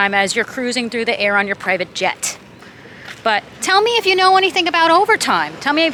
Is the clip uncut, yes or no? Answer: yes